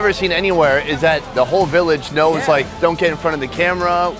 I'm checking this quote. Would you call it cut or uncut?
cut